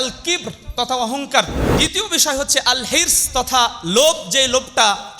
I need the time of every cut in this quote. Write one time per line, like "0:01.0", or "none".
0:01.6